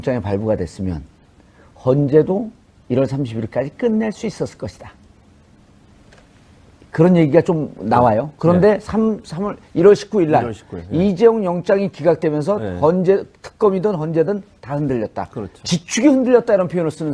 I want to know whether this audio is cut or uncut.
cut